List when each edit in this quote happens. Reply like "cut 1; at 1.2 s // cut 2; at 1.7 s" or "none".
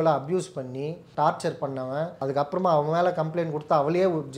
cut 1; at 1.0 s // cut 2; at 2.1 s